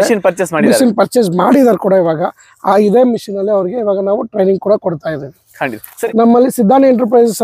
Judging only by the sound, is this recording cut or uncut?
cut